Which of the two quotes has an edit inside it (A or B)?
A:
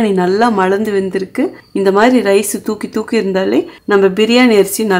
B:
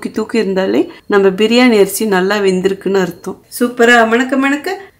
B